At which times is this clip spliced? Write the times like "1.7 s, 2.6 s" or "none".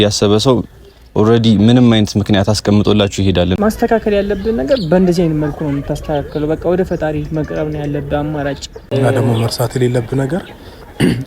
3.6 s, 8.7 s